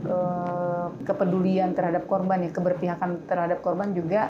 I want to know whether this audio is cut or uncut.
cut